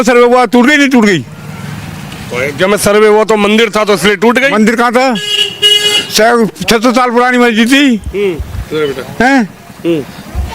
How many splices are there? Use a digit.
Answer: 0